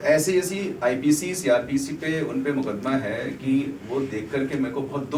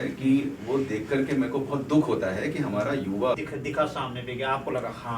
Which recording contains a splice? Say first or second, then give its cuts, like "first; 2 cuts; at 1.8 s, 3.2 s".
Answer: second; 1 cut; at 3.3 s